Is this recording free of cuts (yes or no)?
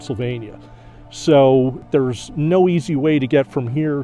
no